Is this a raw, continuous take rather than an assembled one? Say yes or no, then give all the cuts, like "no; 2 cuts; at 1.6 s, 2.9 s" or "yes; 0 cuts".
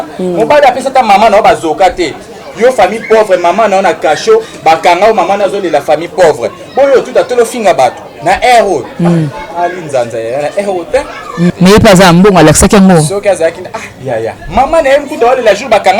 no; 1 cut; at 11.5 s